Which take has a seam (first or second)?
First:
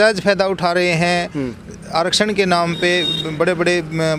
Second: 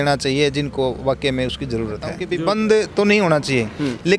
second